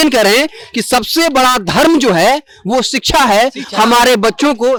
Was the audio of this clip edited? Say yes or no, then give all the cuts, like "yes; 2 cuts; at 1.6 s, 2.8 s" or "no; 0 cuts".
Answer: no; 0 cuts